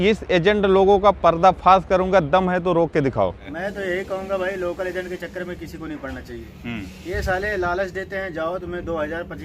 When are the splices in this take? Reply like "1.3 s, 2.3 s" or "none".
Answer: 3.5 s